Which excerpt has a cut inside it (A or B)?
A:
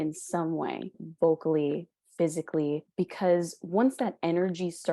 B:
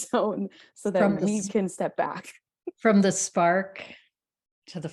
A